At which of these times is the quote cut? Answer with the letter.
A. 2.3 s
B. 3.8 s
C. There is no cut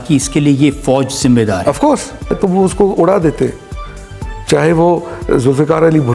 A